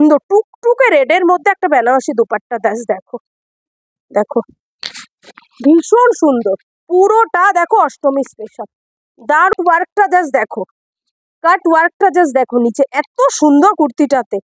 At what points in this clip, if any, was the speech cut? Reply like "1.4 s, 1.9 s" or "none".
9.5 s